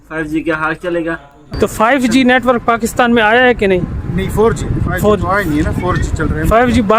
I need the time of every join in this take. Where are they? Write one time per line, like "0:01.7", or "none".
0:01.4